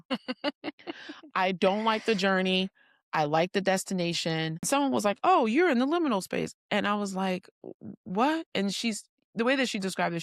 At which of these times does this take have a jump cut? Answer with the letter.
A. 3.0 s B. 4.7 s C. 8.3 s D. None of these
B